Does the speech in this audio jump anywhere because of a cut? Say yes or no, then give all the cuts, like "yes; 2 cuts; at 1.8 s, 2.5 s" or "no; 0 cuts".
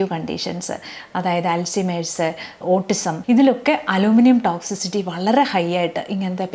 yes; 1 cut; at 3.2 s